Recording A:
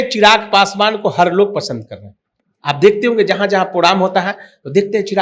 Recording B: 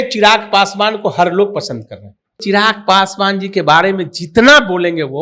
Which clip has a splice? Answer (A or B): B